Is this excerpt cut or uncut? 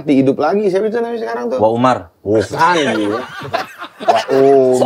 uncut